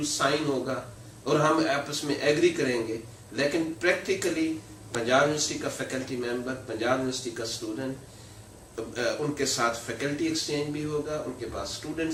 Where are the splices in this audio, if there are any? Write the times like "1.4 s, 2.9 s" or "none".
none

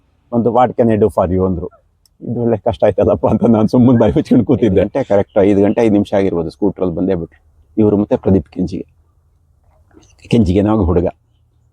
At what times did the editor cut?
5.0 s

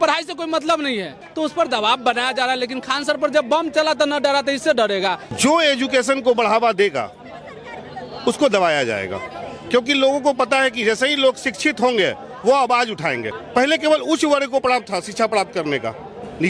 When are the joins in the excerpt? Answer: 1.2 s, 5.3 s, 13.3 s

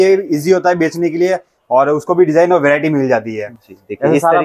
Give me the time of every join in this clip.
none

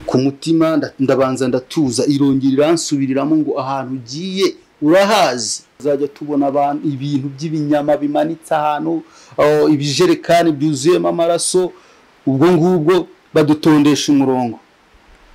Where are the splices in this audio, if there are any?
5.8 s

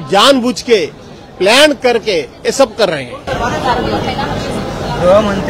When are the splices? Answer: none

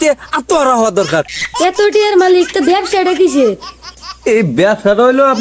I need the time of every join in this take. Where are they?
1.4 s

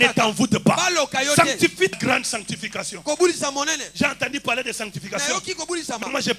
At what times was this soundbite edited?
1.9 s

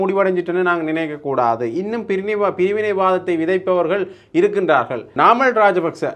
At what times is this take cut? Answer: 5.1 s

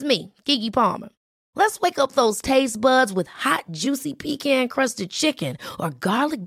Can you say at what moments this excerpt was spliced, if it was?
none

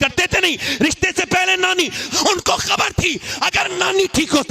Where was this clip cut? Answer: 2.0 s

